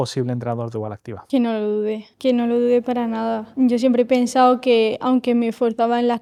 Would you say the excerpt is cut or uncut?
uncut